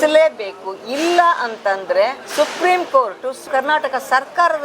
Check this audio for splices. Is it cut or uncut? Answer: cut